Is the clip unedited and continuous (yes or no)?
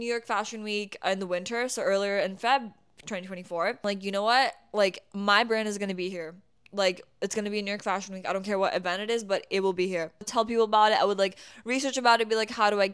no